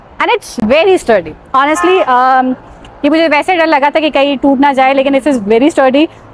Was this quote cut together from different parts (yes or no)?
no